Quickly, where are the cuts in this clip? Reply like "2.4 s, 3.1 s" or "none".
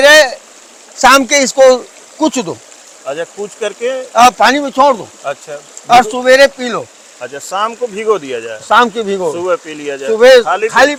none